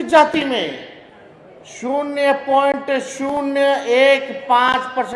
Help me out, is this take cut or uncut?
uncut